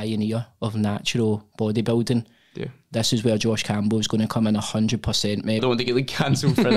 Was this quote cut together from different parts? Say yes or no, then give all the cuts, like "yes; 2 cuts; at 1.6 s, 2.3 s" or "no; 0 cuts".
yes; 1 cut; at 5.6 s